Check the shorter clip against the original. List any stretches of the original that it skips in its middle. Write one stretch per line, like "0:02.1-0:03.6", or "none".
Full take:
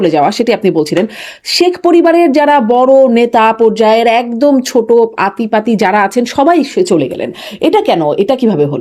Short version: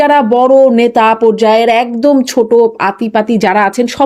none